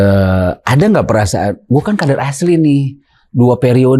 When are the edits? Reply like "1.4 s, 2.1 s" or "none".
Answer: none